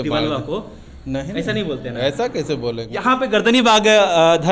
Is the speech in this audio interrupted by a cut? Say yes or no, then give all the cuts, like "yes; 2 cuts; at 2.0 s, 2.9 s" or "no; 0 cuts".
yes; 1 cut; at 2.9 s